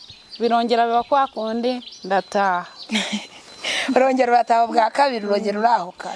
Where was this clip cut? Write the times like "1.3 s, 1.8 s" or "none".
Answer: none